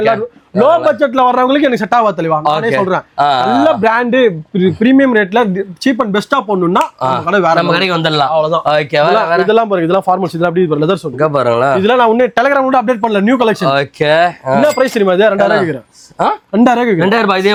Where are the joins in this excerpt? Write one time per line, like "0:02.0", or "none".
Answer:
none